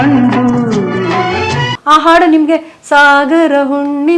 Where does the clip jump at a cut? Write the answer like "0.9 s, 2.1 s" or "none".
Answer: 1.7 s